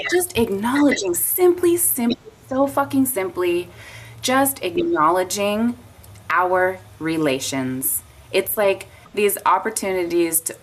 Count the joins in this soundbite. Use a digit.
1